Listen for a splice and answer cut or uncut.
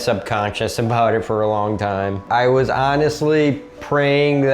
uncut